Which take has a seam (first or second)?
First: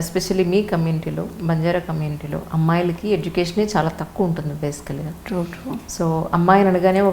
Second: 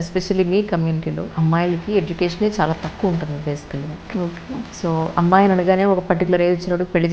second